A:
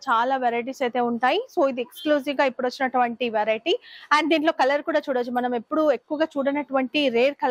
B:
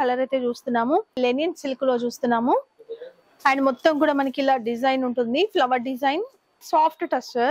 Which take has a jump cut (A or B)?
B